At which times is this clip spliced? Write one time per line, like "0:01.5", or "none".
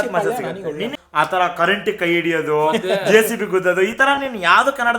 0:01.0